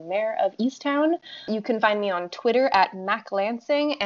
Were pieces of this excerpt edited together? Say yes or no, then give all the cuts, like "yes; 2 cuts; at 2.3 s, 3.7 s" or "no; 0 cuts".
yes; 1 cut; at 1.5 s